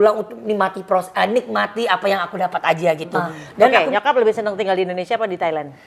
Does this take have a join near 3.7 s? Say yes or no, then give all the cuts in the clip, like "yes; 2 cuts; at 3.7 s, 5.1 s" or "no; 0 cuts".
yes; 1 cut; at 3.7 s